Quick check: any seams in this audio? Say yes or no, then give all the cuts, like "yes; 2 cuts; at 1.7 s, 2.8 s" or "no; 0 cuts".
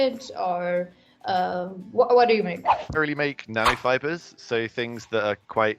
yes; 1 cut; at 3.0 s